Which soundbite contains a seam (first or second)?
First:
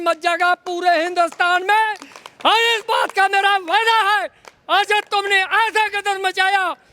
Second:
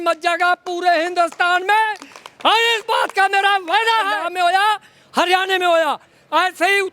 second